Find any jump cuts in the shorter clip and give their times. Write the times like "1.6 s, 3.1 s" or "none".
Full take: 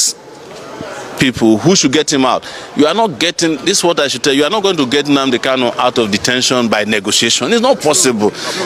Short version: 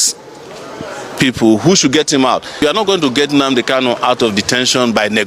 2.7 s